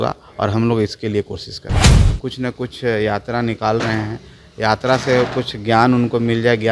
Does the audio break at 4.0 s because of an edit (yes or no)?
no